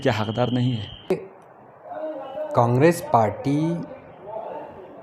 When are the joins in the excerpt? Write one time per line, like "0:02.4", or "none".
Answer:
0:01.1